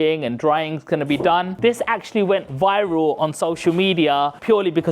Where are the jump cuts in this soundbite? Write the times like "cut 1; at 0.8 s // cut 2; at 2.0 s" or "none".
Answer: cut 1; at 1.5 s